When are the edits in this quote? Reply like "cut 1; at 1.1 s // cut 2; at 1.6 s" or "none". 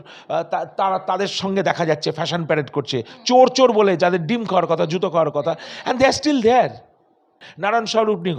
cut 1; at 7.4 s